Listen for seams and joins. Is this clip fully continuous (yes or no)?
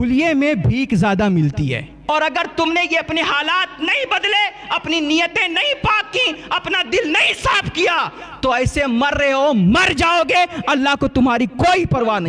no